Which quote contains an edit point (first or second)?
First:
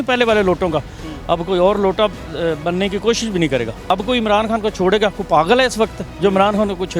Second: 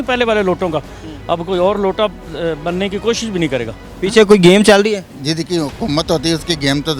second